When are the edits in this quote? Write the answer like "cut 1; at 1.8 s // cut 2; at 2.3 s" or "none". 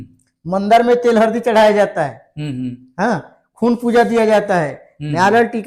none